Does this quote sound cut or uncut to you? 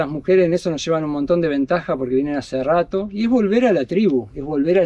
uncut